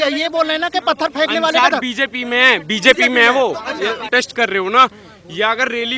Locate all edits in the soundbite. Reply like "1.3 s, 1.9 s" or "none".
4.1 s